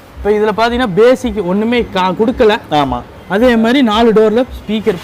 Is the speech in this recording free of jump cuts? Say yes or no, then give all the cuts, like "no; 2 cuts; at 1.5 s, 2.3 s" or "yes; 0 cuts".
yes; 0 cuts